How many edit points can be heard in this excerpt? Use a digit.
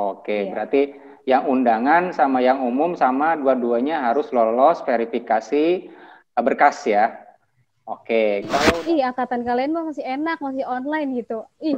1